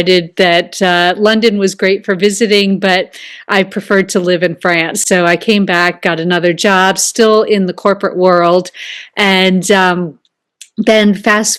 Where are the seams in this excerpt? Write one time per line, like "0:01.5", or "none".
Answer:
none